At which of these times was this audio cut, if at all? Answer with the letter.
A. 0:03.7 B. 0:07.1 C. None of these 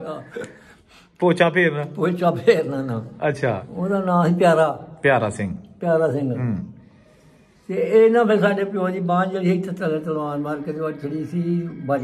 A